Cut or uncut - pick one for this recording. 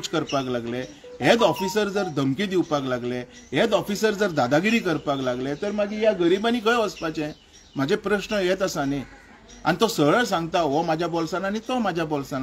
uncut